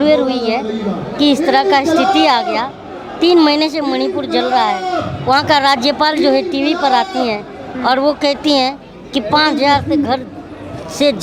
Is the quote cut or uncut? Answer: uncut